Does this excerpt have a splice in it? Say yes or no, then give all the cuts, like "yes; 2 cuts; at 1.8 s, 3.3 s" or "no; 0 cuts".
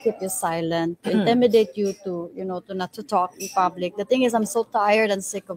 no; 0 cuts